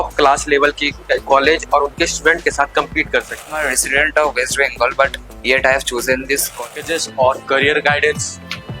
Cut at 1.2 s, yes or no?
no